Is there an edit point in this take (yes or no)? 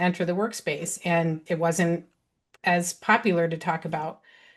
yes